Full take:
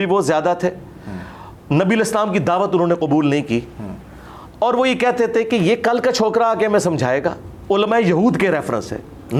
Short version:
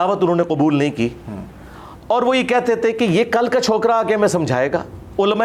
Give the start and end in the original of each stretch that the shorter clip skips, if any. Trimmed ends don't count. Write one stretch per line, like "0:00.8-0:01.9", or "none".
none